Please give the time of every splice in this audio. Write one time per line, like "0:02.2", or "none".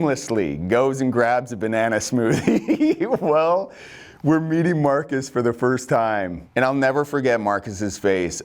0:06.4